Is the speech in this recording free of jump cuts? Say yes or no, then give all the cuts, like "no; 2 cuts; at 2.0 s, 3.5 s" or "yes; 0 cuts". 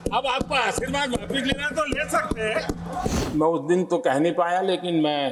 no; 1 cut; at 3.2 s